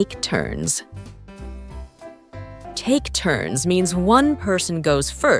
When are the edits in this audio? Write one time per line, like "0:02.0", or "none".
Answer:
0:01.2
0:02.8